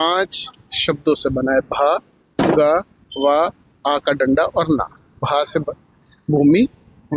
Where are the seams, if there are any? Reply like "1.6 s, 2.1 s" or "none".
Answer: none